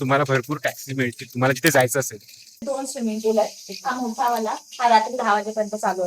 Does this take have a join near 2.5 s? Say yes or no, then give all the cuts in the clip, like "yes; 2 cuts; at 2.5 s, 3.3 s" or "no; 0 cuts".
yes; 1 cut; at 2.5 s